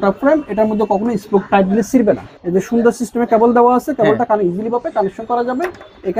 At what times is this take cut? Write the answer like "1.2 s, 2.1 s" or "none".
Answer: 2.3 s